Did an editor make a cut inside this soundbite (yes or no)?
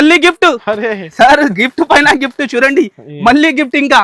no